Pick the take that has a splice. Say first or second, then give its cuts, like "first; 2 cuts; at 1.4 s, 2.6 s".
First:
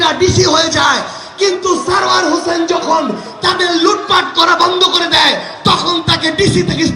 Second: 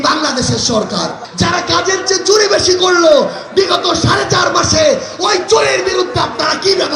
second; 1 cut; at 1.2 s